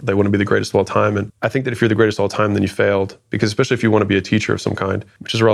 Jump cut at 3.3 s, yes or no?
no